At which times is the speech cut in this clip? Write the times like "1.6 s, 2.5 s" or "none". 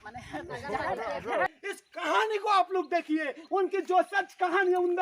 1.5 s